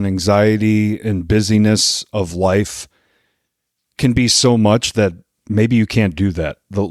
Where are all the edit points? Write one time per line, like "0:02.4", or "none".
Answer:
none